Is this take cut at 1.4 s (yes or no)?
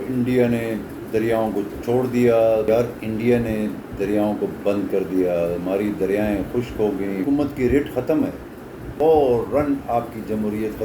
no